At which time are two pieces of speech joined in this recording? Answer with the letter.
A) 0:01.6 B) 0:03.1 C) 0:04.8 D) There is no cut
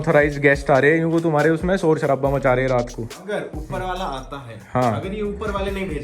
B